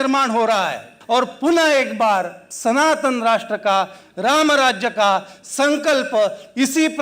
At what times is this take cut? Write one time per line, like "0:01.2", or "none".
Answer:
0:00.9